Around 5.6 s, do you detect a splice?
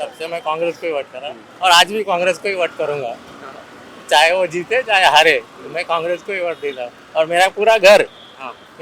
no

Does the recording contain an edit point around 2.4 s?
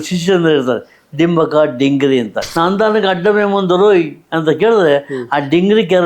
yes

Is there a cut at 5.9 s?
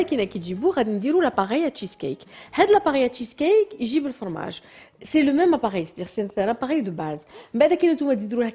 yes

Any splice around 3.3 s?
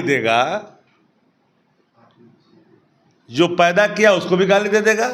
no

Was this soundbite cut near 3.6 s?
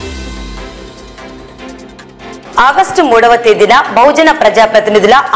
no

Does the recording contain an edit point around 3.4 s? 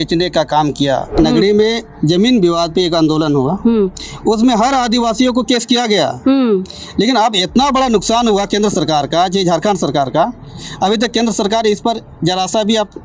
no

